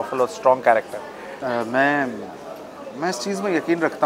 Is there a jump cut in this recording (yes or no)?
yes